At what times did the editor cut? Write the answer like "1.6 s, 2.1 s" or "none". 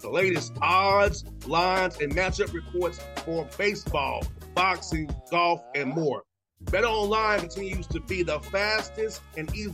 none